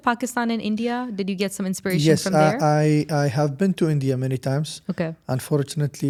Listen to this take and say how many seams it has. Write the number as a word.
zero